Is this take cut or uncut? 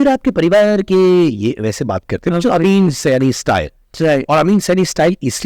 uncut